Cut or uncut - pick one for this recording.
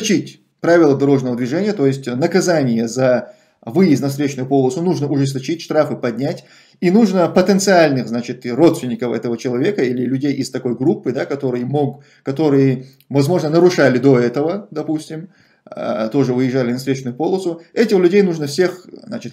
uncut